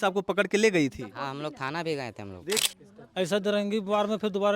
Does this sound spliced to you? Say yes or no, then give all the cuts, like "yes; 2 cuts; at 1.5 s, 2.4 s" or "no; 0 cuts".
yes; 1 cut; at 2.6 s